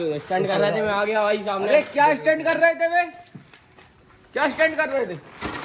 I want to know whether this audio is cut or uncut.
uncut